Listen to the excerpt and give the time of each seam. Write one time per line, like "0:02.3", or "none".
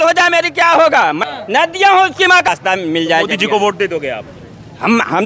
0:01.2
0:02.5

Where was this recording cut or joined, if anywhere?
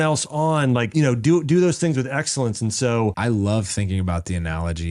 0:00.9
0:03.2

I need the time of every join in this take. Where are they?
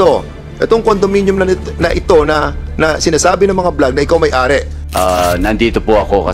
0:04.8

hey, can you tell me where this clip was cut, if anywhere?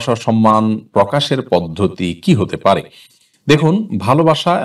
none

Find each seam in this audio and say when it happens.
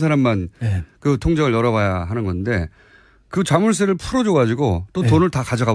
0:02.1

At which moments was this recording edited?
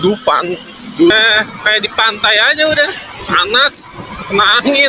0:01.1

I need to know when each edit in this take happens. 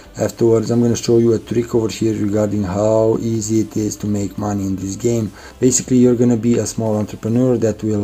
0:05.4

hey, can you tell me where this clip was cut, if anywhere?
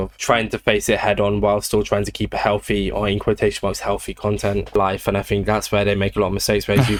none

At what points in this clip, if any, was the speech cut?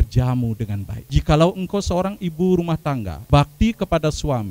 0:00.9
0:03.1

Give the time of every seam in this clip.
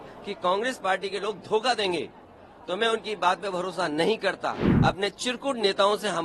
0:04.7

